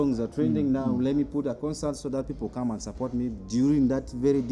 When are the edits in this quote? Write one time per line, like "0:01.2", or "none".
none